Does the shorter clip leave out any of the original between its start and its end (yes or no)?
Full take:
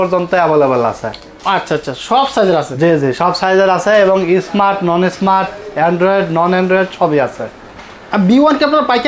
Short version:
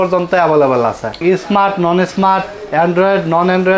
yes